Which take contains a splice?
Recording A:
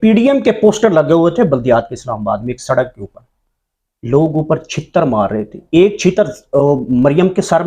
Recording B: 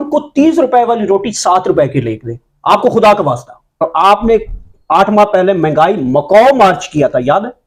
B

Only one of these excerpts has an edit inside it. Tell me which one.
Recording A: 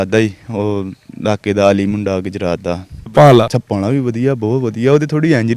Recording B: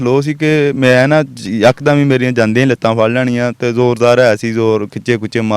A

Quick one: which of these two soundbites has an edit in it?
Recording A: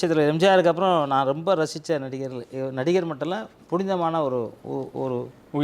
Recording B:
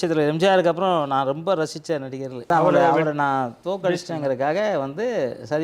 B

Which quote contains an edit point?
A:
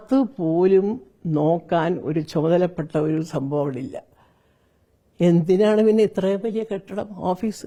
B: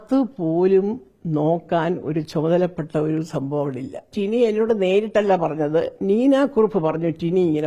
B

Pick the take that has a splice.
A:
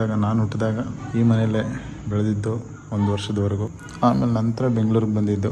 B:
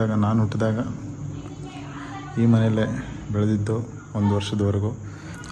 A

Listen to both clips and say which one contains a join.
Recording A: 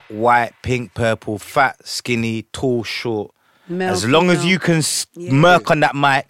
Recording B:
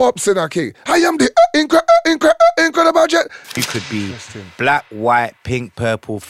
B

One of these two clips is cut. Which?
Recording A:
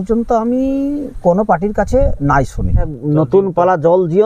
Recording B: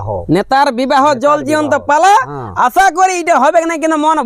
A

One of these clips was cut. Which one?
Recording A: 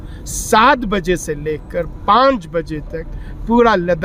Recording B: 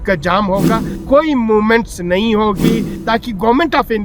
B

